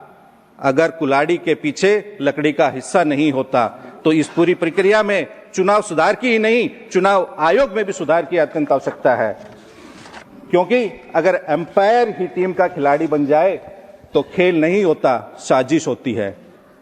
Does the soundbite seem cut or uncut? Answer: uncut